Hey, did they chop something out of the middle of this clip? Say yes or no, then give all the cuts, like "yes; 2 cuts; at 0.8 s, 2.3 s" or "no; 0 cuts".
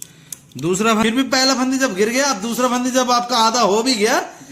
yes; 1 cut; at 1.0 s